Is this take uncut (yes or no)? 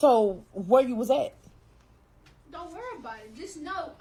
yes